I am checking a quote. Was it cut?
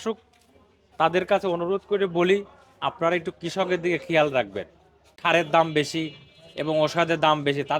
yes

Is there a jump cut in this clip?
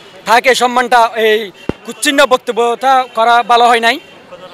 no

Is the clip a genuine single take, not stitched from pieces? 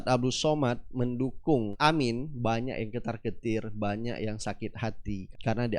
no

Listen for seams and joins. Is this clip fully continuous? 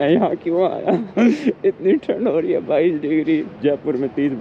yes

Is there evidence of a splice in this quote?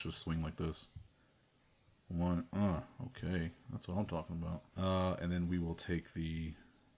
no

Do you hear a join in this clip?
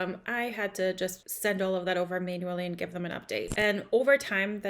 yes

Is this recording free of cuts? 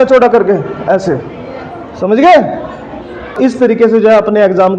no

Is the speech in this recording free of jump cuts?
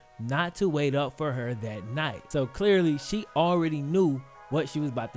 yes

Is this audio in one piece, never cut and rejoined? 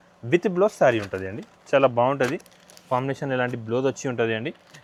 yes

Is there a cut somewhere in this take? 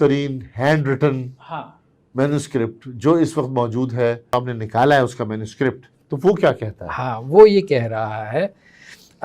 yes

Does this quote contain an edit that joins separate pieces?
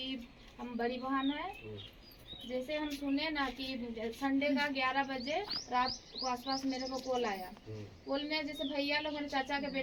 no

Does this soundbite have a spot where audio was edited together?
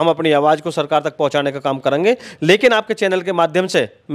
no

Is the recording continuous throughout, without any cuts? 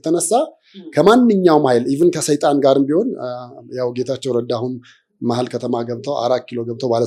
yes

